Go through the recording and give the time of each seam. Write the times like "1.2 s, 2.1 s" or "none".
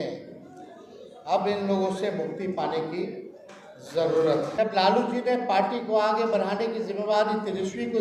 4.5 s